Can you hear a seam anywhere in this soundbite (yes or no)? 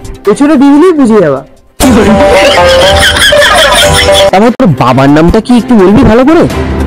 no